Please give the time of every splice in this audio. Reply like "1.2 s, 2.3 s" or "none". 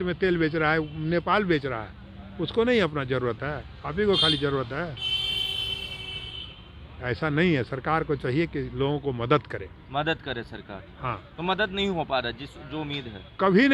none